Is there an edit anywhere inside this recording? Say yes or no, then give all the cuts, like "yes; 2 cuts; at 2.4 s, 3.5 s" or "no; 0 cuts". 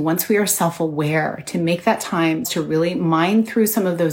yes; 1 cut; at 2.5 s